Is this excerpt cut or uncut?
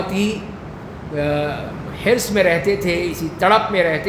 uncut